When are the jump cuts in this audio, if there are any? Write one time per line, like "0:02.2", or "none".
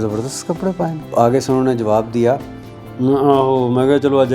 0:01.1